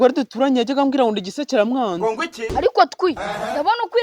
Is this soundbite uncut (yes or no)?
no